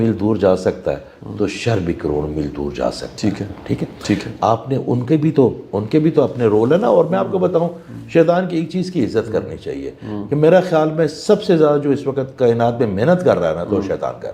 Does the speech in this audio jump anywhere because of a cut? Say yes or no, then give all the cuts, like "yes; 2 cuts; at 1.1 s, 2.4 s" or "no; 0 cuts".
no; 0 cuts